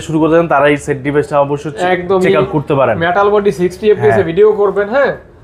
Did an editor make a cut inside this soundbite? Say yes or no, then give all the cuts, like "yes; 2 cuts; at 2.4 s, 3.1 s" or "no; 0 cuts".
no; 0 cuts